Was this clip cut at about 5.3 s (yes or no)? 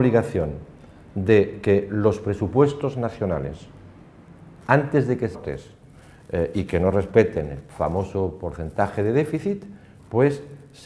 no